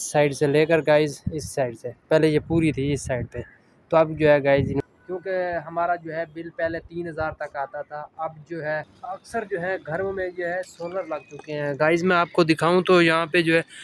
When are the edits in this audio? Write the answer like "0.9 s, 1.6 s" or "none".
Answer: 4.8 s, 8.9 s